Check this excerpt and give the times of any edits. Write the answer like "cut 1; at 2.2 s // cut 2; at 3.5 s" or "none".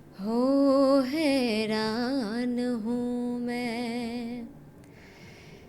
none